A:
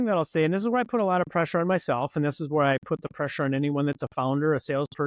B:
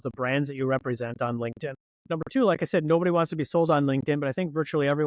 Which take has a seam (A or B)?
B